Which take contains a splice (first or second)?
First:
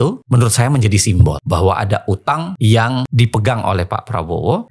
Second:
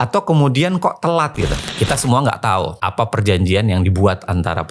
second